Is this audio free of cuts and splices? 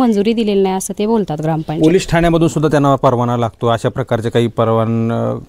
yes; 0 cuts

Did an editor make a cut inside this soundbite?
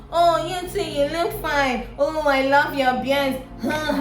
no; 0 cuts

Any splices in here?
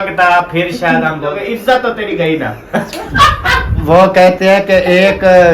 yes; 1 cut; at 1.4 s

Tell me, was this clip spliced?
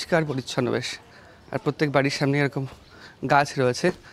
no; 0 cuts

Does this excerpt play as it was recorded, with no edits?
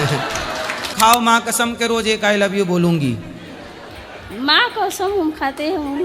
no; 1 cut; at 0.9 s

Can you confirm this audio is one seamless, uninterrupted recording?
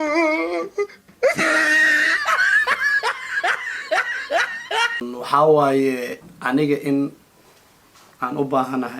no; 1 cut; at 5.1 s

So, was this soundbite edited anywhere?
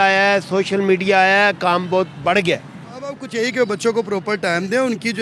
yes; 1 cut; at 3.2 s

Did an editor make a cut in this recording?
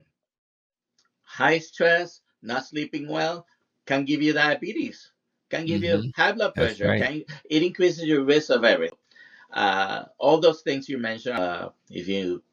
yes; 2 cuts; at 9.1 s, 11.4 s

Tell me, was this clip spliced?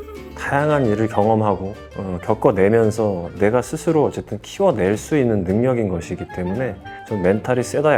no; 0 cuts

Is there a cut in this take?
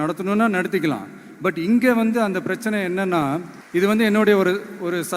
yes; 1 cut; at 3.6 s

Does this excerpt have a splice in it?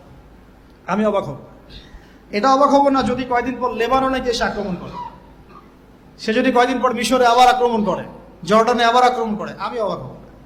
no; 0 cuts

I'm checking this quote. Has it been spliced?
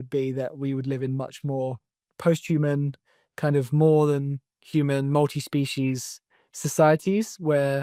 no; 0 cuts

